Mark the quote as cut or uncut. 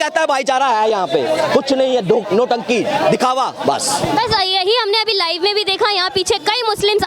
uncut